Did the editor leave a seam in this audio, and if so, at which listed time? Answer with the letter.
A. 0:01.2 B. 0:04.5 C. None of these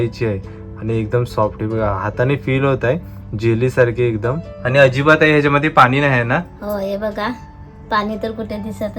B